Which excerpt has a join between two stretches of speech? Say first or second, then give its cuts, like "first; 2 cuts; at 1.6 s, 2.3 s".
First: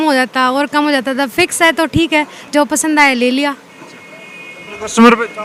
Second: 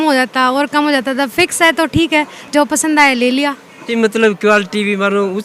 second; 1 cut; at 3.8 s